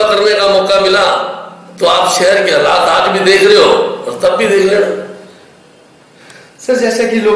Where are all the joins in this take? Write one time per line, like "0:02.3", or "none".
none